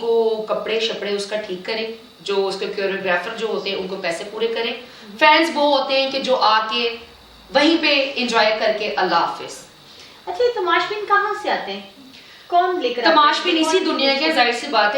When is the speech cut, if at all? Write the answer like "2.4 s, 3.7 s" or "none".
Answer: none